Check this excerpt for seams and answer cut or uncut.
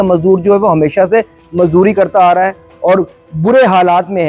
uncut